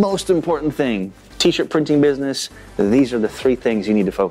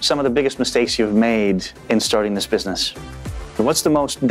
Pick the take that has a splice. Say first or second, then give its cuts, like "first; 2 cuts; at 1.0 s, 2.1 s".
second; 2 cuts; at 1.7 s, 3.5 s